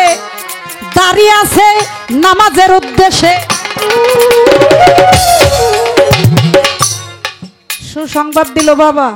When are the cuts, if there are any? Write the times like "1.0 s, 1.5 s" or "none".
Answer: none